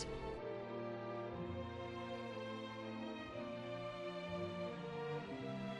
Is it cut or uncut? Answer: cut